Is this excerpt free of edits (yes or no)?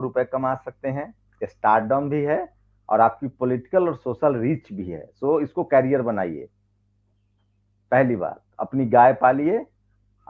yes